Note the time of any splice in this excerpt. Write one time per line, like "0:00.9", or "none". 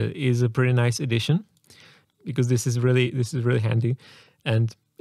0:01.9